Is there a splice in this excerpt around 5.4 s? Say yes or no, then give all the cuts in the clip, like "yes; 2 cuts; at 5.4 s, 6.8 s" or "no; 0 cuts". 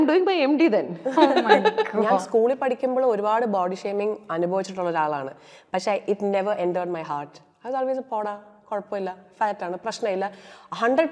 no; 1 cut; at 2.2 s